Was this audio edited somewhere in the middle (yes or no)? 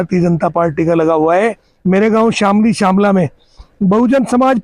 yes